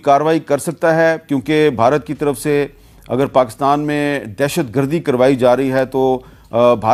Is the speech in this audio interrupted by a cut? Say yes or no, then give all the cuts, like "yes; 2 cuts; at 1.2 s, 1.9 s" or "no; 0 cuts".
no; 0 cuts